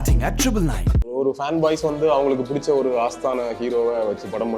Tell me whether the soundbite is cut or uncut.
cut